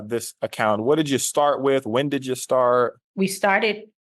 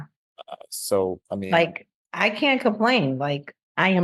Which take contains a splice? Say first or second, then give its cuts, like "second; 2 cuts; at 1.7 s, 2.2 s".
first; 1 cut; at 3.0 s